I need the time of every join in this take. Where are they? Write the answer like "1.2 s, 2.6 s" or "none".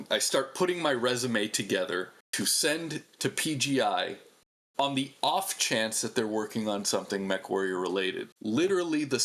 2.2 s, 8.3 s